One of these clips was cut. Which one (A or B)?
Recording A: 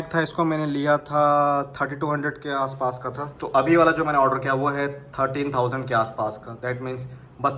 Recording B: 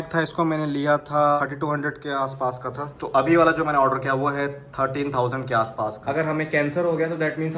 B